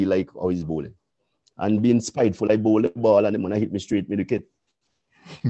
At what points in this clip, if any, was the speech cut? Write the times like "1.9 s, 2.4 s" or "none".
none